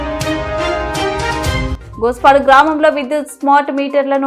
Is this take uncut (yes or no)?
no